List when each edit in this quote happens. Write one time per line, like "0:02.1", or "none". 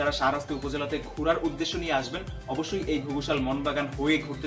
none